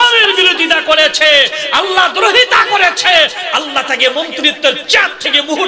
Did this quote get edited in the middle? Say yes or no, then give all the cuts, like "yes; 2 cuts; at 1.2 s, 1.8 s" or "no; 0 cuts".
no; 0 cuts